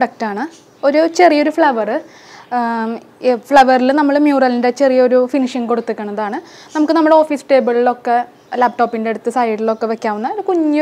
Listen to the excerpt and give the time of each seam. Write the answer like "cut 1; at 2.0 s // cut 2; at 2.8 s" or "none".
none